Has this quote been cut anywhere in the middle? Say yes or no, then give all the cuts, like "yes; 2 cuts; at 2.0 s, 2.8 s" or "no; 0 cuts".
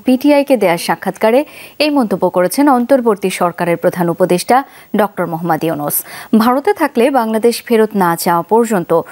no; 0 cuts